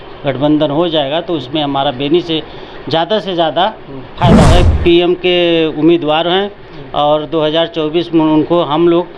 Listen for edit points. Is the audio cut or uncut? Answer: cut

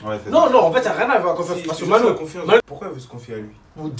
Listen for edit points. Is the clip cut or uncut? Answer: cut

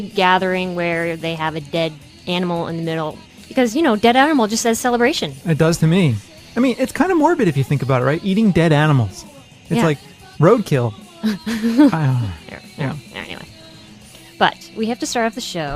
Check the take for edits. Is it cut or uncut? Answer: cut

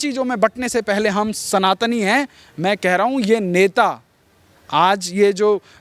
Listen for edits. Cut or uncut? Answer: uncut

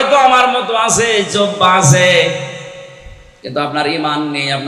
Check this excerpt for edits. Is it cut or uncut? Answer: uncut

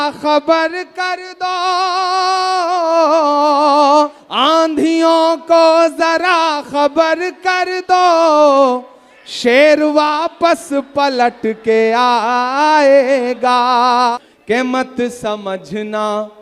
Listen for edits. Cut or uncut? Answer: cut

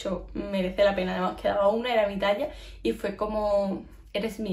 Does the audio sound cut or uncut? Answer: uncut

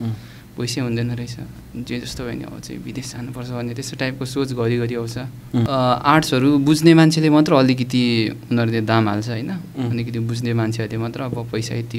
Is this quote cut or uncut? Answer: cut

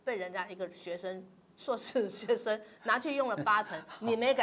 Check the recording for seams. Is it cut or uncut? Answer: uncut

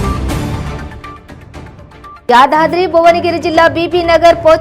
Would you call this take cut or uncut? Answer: cut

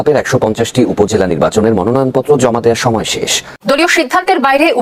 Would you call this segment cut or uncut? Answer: cut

